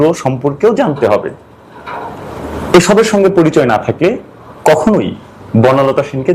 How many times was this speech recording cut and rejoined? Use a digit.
0